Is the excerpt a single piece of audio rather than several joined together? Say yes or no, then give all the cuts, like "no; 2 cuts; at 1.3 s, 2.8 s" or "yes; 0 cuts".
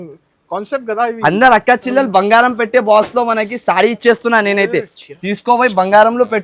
yes; 0 cuts